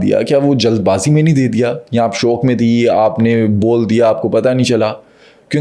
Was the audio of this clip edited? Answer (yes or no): no